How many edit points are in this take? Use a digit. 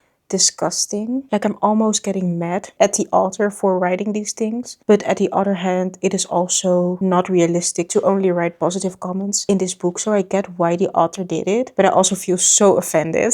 0